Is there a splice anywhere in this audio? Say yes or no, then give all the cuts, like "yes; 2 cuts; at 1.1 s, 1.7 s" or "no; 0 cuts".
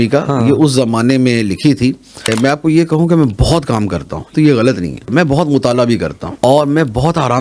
yes; 4 cuts; at 2.3 s, 4.3 s, 5.1 s, 6.2 s